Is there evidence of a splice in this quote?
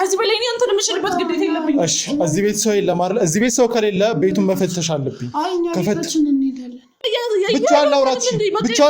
yes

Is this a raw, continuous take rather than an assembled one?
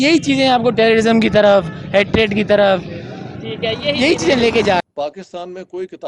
no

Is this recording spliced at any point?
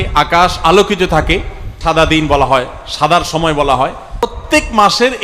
yes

